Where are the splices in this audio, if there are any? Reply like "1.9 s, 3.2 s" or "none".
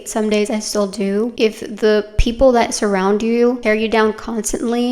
1.3 s